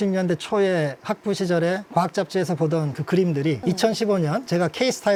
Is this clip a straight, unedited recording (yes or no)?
yes